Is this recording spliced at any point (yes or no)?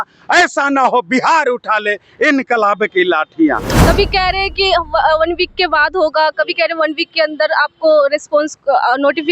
yes